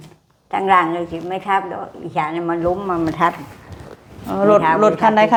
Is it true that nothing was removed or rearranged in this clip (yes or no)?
yes